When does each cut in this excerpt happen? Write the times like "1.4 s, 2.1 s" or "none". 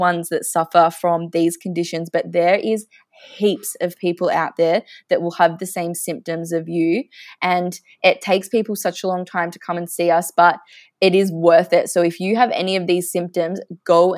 none